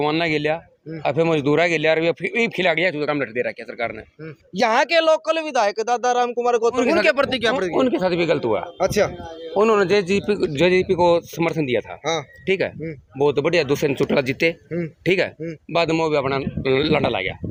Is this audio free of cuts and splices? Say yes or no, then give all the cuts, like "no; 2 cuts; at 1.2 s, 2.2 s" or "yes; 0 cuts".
yes; 0 cuts